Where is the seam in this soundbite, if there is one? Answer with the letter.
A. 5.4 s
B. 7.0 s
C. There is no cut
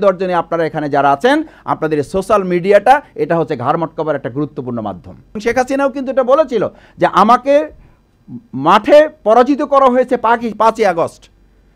A